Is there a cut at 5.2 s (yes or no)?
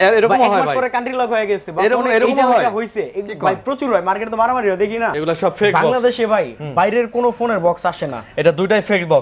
yes